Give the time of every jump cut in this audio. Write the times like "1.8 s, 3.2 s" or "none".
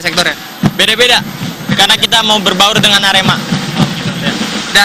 none